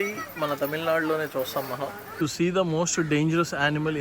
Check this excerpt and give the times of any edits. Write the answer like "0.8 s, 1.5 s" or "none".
2.0 s